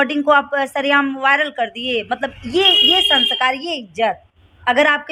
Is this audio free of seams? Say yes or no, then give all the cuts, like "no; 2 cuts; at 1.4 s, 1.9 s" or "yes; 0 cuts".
yes; 0 cuts